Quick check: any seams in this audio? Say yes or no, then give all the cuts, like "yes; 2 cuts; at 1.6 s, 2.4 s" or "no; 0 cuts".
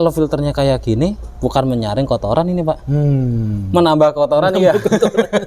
no; 0 cuts